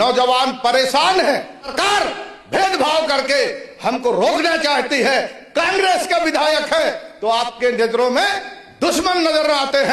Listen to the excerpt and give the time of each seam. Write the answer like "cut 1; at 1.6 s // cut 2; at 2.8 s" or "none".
cut 1; at 1.7 s